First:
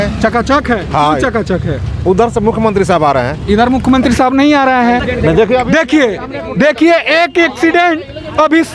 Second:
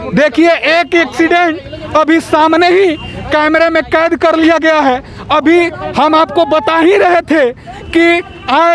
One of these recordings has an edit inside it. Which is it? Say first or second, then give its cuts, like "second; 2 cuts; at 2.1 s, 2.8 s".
first; 1 cut; at 5.1 s